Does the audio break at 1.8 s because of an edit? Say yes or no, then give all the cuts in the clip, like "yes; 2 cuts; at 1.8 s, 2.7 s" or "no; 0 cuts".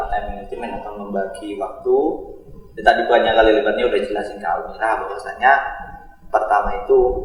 no; 0 cuts